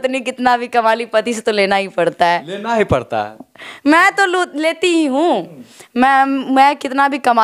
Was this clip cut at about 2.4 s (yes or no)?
no